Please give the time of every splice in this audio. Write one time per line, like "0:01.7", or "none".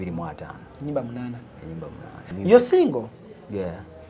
0:02.3